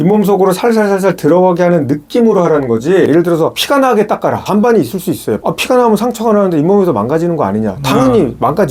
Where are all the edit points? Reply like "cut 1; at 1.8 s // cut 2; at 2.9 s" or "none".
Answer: none